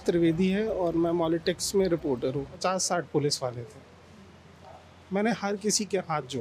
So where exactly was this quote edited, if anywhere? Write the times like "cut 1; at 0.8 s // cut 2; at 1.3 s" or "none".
cut 1; at 2.6 s